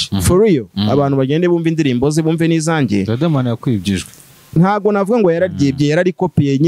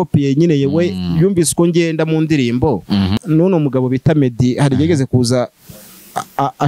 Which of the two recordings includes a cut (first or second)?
second